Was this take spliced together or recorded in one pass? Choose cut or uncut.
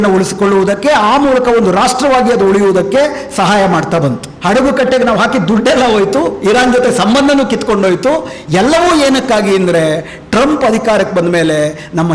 cut